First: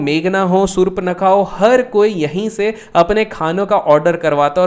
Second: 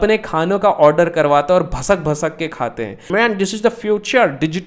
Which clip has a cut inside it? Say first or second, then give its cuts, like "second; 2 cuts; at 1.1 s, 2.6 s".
second; 1 cut; at 3.1 s